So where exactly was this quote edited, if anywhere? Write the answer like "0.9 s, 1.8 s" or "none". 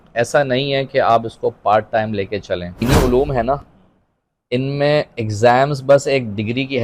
2.8 s